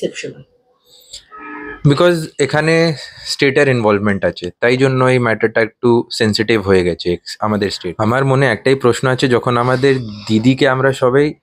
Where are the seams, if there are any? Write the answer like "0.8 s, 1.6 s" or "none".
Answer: 7.3 s